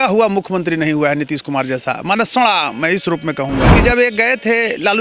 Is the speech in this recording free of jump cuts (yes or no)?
no